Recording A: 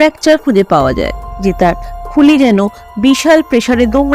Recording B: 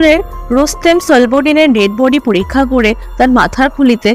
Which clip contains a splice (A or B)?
A